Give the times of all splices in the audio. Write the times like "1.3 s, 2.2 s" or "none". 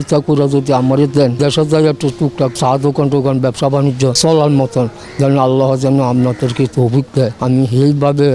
1.4 s, 2.5 s, 4.2 s, 7.4 s